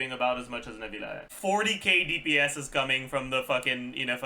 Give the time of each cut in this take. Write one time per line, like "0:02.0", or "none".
0:01.2

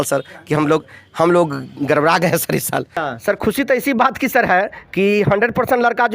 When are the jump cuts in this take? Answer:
0:03.0

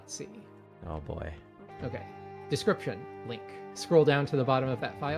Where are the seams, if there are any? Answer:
0:01.5
0:03.7

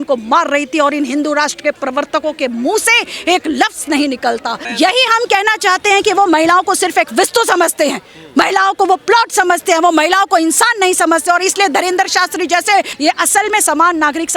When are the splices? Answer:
0:04.6
0:12.9

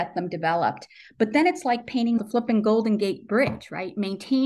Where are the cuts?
0:02.2

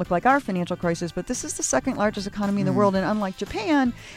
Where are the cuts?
none

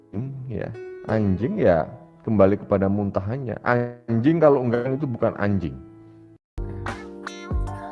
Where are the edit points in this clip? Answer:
0:06.6

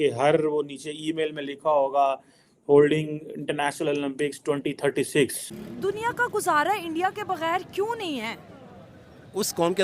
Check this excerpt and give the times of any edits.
0:05.4

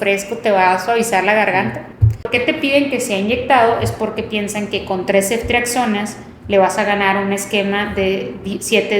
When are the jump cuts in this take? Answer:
0:02.3

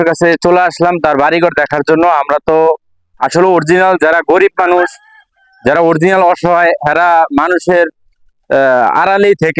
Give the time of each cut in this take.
none

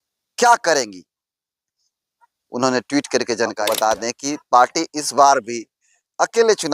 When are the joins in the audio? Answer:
0:03.6

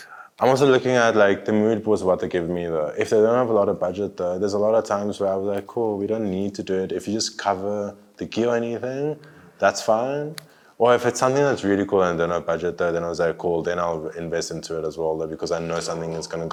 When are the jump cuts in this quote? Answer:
none

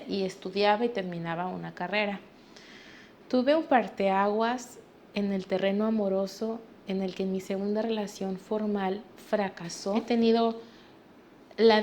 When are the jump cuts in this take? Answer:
0:10.0

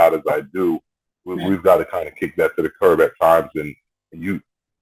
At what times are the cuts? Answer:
none

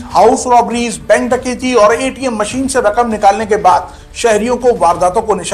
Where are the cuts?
none

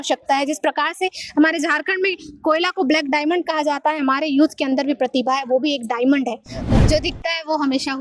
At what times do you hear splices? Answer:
0:06.7

